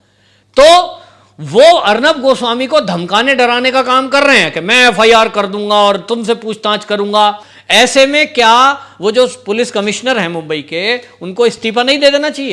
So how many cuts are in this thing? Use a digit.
1